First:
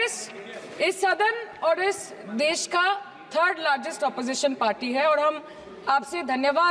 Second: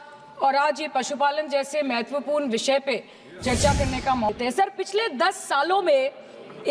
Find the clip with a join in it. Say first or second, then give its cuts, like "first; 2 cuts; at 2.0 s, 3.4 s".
second; 1 cut; at 4.3 s